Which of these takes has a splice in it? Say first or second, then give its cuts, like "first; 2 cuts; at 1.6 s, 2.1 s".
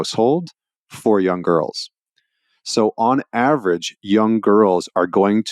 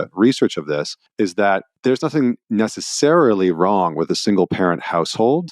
second; 2 cuts; at 1.0 s, 2.4 s